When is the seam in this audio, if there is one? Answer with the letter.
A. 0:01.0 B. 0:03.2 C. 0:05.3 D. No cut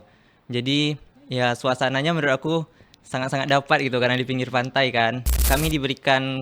C